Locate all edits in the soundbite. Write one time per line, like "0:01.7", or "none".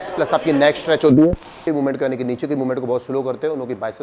0:01.6